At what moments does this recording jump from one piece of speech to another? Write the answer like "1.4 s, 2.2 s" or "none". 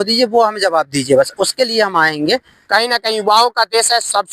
2.6 s